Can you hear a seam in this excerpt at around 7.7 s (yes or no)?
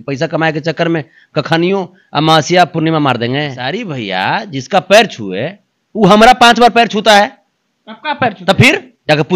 no